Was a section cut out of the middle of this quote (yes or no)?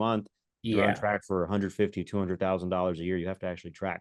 no